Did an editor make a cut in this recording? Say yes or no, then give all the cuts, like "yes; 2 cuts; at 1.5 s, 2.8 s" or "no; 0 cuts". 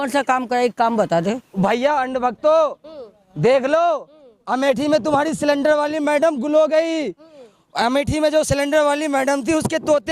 yes; 1 cut; at 1.5 s